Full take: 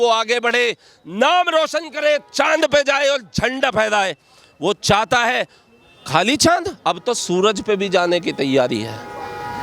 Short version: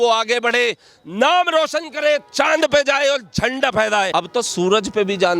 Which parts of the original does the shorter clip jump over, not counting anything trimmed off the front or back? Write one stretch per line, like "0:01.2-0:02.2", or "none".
0:04.1-0:06.8